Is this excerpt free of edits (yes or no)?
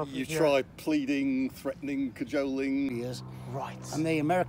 no